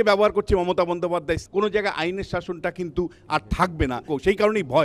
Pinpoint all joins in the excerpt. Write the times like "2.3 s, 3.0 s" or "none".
1.4 s, 4.0 s